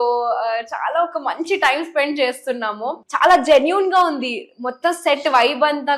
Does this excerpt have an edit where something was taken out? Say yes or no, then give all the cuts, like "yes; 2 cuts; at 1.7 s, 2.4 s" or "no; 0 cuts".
yes; 1 cut; at 3.0 s